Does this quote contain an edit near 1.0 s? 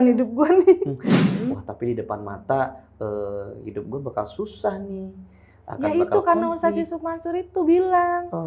yes; 1 cut; at 1.0 s

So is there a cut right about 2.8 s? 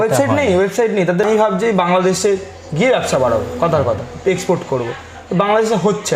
no; 1 cut; at 1.2 s

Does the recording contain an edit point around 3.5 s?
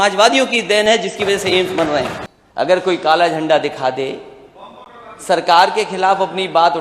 no; 1 cut; at 2.3 s

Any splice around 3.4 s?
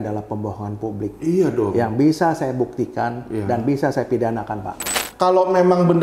no; 1 cut; at 4.9 s

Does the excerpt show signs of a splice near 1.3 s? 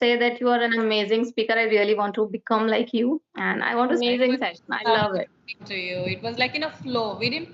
no; 1 cut; at 4.0 s

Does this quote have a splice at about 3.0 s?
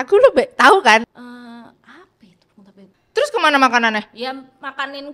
yes; 2 cuts; at 1.1 s, 3.0 s

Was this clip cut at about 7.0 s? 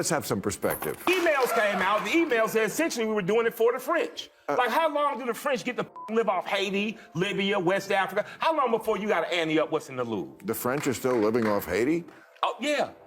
no; 1 cut; at 1.0 s

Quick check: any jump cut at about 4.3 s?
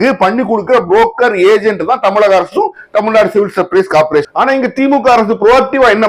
yes; 1 cut; at 4.3 s

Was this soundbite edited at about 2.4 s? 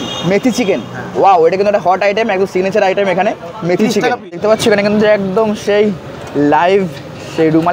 no; 1 cut; at 4.2 s

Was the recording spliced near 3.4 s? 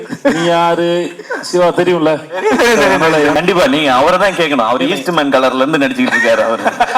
yes; 1 cut; at 3.4 s

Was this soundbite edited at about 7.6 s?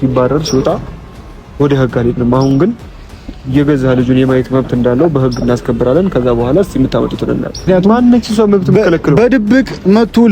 yes; 1 cut; at 7.6 s

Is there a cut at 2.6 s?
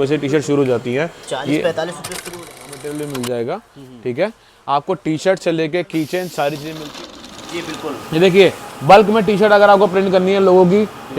yes; 2 cuts; at 2.6 s, 7.2 s

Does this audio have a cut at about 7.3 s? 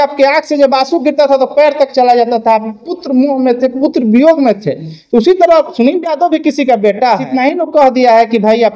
yes; 1 cut; at 7.3 s

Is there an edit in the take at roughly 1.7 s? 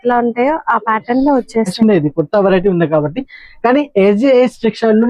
yes; 1 cut; at 1.7 s

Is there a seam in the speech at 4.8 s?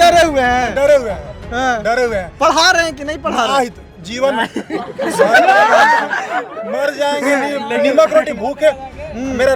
no; 0 cuts

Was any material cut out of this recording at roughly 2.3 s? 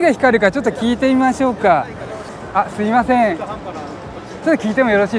yes; 1 cut; at 2.3 s

